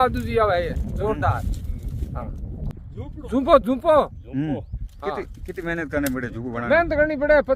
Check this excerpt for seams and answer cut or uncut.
uncut